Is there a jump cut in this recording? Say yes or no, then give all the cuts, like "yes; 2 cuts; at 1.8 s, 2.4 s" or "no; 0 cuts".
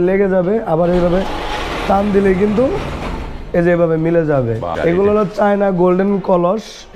yes; 1 cut; at 4.7 s